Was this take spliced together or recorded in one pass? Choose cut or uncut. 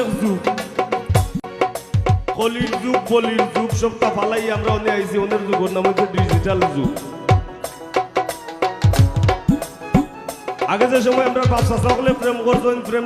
cut